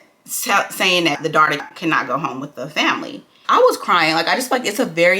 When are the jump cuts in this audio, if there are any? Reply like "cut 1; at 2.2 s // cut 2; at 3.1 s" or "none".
cut 1; at 1.6 s // cut 2; at 3.3 s